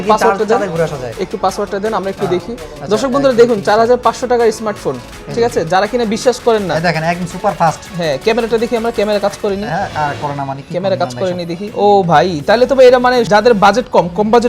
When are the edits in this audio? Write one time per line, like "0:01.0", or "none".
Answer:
0:11.6
0:13.3